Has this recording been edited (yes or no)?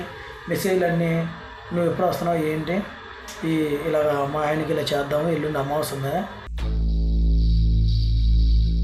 no